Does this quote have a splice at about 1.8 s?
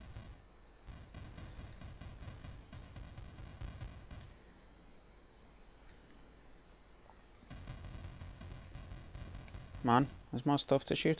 yes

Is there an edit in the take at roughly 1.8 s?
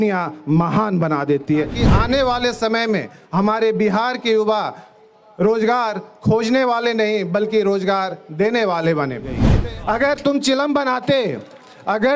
yes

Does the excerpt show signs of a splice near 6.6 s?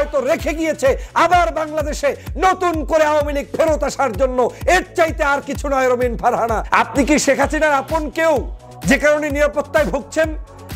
yes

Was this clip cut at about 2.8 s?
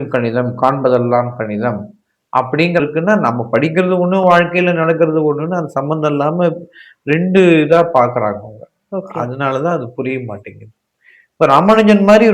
yes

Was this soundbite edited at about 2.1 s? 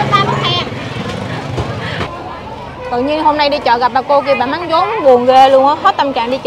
yes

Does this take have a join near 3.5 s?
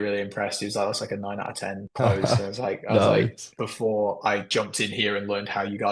yes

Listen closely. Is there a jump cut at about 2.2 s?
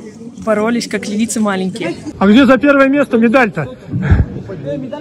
yes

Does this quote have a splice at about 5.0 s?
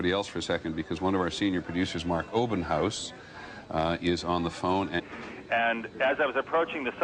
no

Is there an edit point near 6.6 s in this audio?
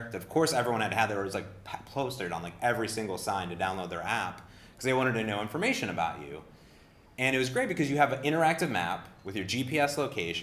no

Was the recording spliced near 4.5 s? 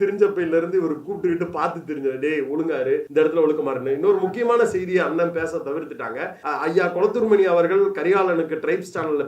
no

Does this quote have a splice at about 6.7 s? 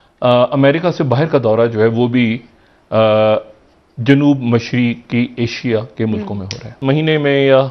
yes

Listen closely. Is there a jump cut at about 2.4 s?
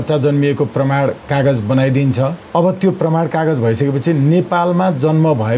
yes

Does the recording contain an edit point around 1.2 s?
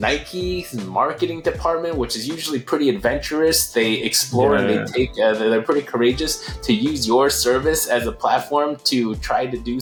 no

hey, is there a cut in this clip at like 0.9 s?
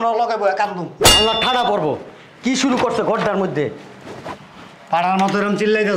yes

